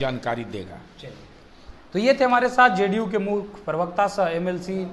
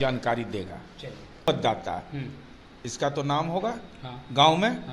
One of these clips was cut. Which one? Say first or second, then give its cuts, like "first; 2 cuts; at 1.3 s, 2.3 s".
second; 1 cut; at 1.4 s